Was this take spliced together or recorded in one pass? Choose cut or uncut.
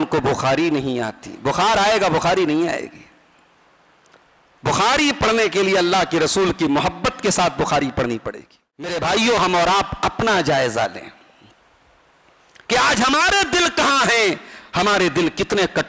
cut